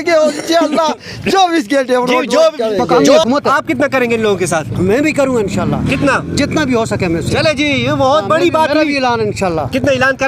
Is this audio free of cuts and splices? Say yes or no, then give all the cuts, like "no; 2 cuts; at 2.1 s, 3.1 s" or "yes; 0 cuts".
no; 1 cut; at 3.2 s